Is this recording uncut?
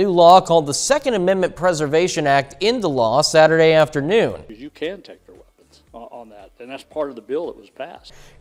yes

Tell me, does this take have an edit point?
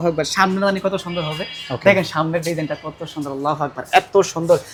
no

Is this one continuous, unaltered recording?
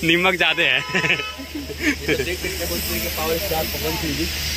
yes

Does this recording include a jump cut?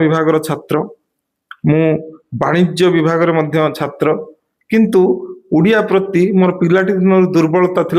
no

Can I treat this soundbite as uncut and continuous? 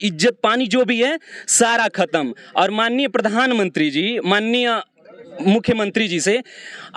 yes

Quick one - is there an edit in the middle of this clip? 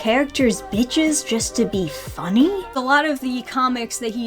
no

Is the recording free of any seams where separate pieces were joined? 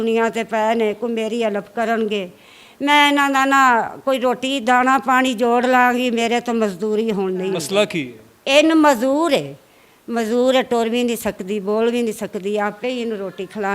no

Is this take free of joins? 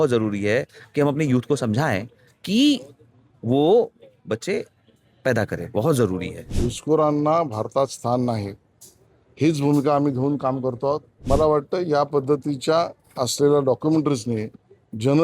no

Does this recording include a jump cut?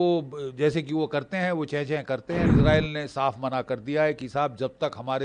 yes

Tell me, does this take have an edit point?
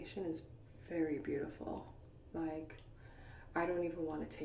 no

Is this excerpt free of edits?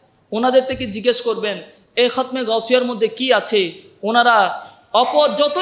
yes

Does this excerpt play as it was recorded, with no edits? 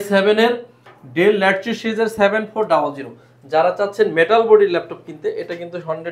yes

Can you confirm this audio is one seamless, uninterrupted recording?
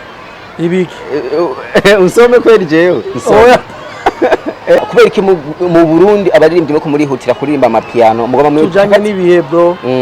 no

